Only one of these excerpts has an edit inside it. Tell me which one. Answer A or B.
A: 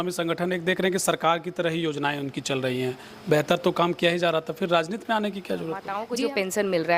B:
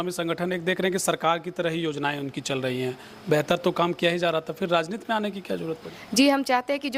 A